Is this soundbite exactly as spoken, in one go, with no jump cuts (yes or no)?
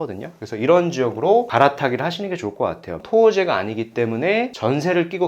no